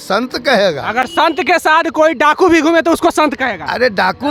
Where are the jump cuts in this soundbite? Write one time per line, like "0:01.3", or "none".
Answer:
none

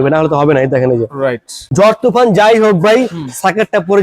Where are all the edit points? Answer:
0:01.6

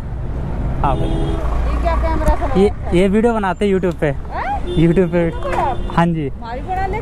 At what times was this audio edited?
0:01.4

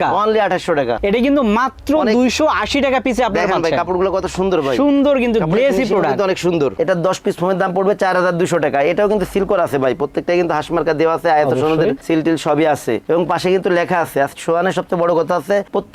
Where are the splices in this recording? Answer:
0:01.0
0:06.7

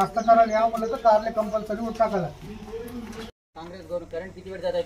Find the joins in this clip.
0:03.5

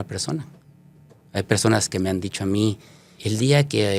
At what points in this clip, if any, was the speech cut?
0:03.1

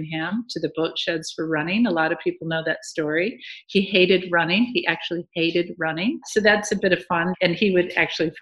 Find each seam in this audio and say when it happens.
0:06.2
0:07.3

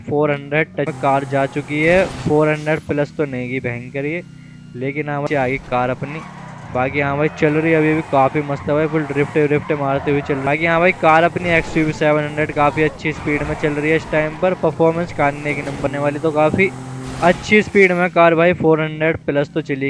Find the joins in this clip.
0:00.9
0:05.2
0:10.4
0:15.9

